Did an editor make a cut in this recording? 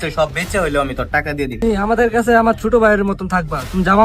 yes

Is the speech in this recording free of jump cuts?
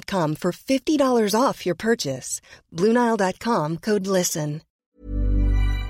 no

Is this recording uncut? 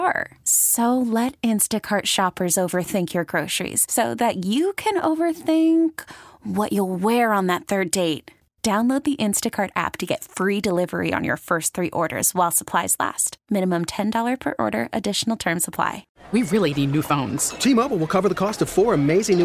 no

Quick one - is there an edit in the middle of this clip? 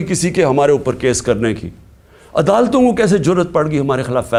no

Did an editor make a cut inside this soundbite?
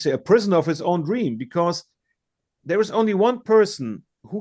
no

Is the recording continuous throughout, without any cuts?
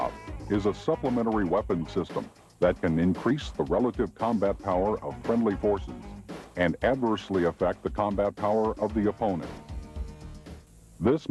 no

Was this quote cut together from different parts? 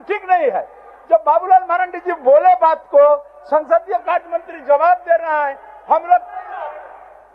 no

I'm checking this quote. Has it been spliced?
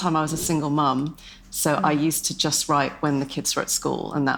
no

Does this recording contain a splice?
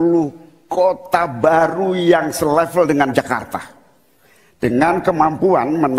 no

